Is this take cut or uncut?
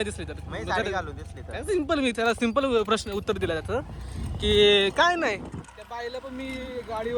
uncut